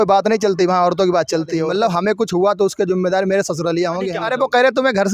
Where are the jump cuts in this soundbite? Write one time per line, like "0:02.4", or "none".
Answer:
0:01.7
0:04.2